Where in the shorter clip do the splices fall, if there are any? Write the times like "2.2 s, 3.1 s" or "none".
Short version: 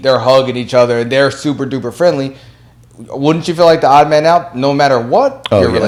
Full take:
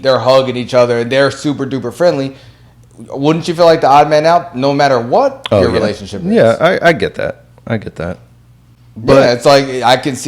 none